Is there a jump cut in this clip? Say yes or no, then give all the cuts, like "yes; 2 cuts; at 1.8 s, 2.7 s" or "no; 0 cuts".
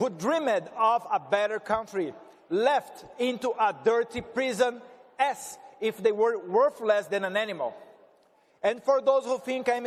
no; 0 cuts